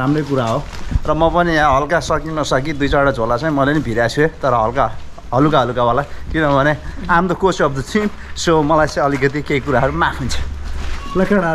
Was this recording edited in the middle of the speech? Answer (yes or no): no